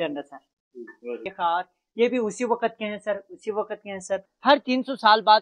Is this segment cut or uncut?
cut